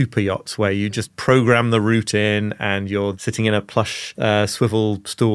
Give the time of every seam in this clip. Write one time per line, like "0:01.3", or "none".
0:03.1
0:04.1